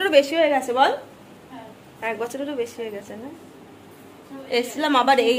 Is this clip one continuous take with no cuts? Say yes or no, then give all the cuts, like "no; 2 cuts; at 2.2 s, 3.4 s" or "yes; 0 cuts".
yes; 0 cuts